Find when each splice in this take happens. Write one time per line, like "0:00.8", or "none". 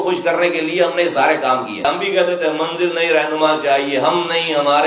0:01.8